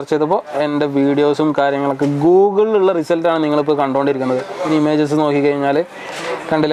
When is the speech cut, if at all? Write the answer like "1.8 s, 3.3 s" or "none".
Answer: 4.6 s